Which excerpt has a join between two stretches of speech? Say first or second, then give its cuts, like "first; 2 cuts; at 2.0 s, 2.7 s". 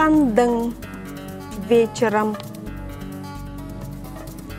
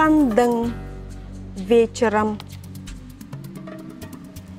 second; 1 cut; at 2.4 s